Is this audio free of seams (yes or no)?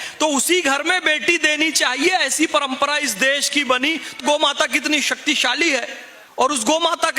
no